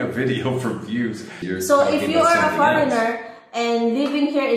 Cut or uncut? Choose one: cut